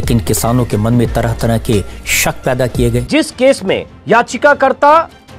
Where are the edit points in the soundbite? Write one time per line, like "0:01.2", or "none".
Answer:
0:03.1
0:03.9